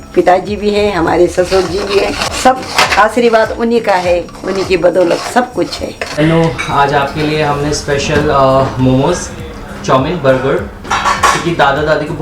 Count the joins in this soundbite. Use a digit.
2